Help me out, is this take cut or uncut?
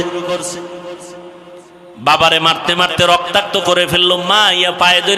cut